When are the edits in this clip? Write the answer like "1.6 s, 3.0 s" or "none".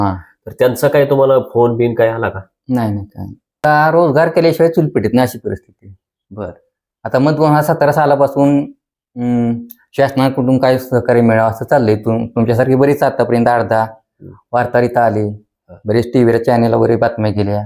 3.6 s